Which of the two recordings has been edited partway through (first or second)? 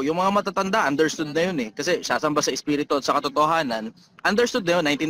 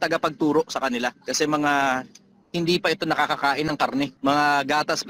second